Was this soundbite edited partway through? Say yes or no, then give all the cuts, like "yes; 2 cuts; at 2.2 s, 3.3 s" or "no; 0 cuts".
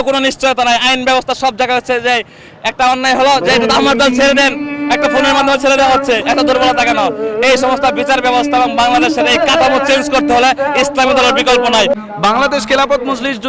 yes; 1 cut; at 11.9 s